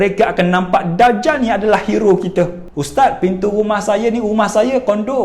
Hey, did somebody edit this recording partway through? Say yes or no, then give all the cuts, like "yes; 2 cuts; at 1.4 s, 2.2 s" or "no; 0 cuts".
yes; 1 cut; at 2.7 s